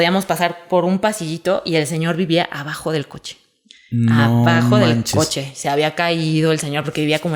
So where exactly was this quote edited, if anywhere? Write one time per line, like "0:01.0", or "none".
none